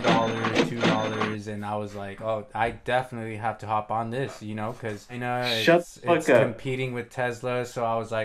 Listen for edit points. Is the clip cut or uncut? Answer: cut